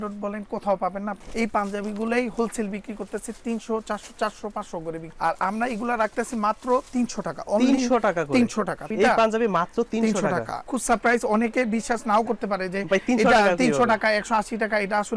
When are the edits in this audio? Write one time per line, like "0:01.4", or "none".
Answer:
0:01.2
0:05.1
0:08.9
0:10.6